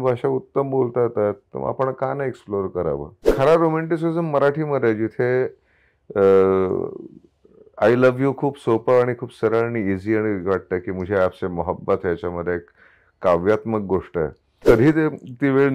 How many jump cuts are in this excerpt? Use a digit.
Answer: 2